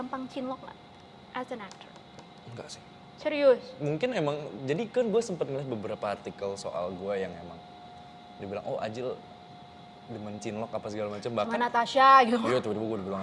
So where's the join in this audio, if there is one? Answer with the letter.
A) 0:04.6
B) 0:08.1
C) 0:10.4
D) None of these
D